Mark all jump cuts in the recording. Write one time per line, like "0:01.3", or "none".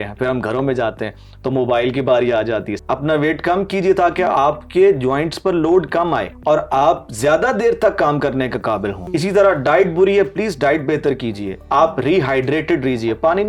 0:02.7
0:06.3
0:09.0
0:11.5

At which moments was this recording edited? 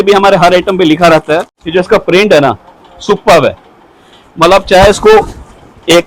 0:01.6

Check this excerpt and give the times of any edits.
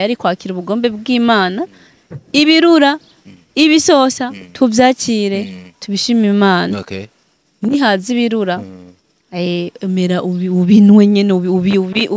none

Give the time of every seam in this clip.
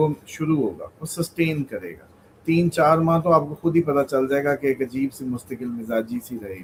none

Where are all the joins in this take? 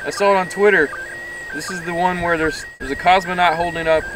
0:02.7

